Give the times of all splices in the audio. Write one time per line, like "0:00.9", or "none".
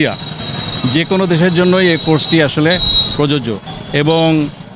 none